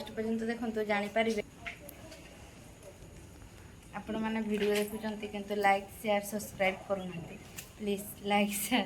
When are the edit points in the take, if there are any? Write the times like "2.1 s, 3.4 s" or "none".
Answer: 1.4 s